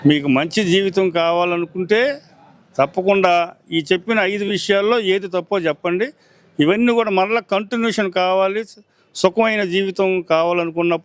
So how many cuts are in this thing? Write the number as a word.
zero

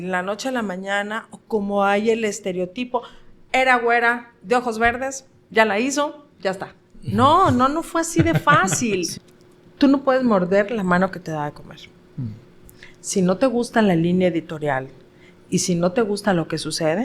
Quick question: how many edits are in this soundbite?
one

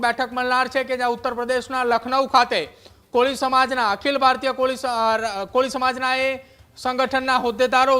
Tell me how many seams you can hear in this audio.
zero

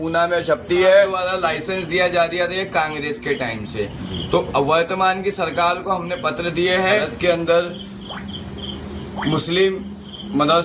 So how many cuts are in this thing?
two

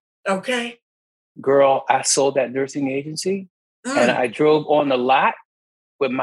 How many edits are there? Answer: one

